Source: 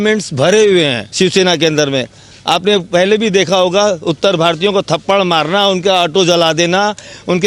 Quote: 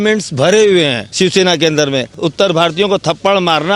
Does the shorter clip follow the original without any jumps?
no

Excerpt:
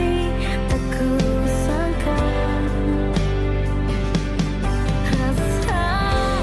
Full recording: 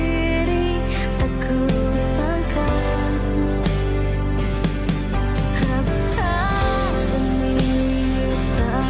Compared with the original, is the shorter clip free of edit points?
yes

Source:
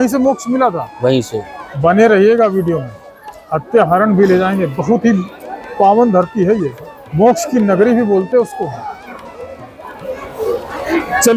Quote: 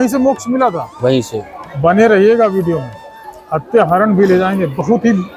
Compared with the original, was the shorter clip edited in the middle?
no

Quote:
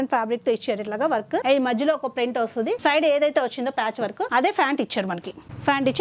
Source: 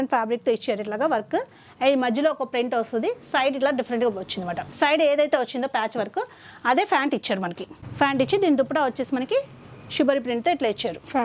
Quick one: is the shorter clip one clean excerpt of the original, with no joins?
no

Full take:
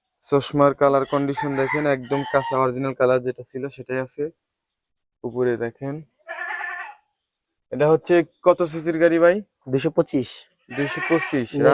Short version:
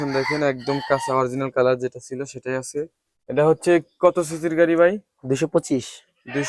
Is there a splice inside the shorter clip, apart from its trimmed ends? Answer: yes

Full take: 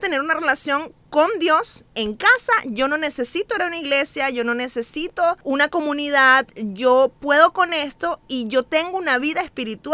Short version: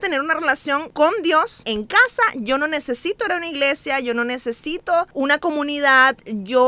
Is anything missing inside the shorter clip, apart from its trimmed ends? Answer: yes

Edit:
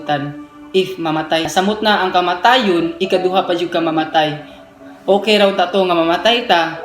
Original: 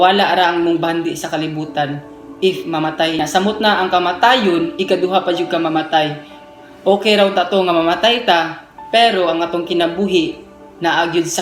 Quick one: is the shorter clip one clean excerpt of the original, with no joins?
no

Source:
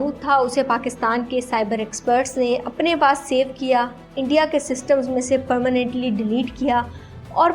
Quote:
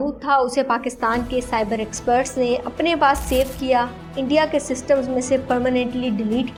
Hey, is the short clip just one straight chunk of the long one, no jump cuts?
yes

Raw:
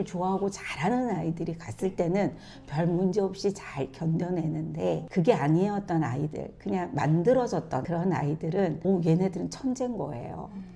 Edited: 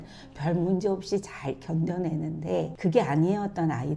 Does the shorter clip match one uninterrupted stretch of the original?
yes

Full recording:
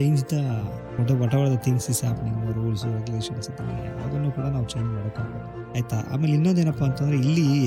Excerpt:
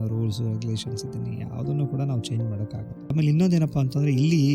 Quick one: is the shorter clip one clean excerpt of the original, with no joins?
no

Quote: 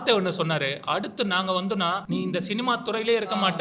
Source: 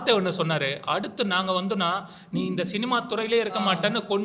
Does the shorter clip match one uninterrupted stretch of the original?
no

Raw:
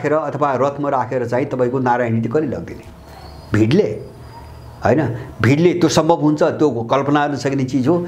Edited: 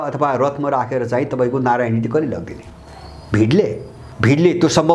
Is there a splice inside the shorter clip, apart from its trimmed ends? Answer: yes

